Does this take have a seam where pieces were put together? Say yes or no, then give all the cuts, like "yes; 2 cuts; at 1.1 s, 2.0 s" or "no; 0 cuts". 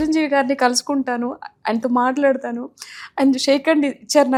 no; 0 cuts